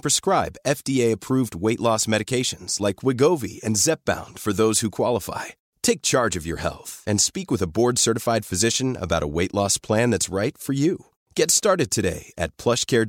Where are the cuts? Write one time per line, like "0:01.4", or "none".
none